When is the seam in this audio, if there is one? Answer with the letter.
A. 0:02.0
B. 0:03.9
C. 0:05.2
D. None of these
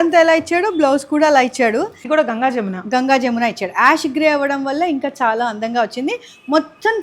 A